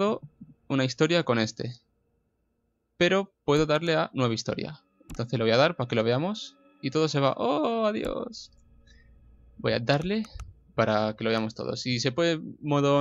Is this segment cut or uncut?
uncut